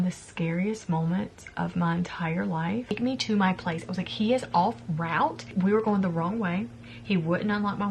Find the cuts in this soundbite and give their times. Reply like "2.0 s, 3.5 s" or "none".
2.9 s, 5.5 s